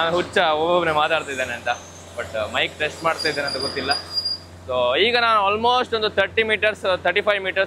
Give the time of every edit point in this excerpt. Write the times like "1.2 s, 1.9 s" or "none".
none